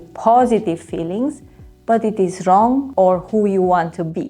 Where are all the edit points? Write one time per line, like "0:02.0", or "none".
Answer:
0:03.3